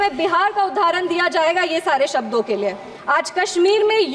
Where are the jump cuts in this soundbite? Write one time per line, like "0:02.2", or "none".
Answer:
0:02.9